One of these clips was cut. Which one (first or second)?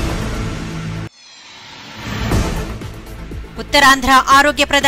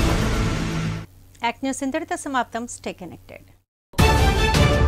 first